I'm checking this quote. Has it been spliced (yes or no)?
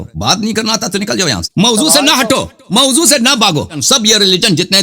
yes